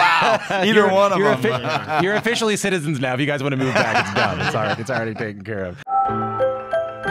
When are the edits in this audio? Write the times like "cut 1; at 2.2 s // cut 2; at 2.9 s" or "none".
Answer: cut 1; at 5.8 s